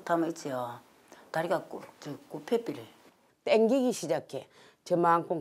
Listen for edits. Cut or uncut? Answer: cut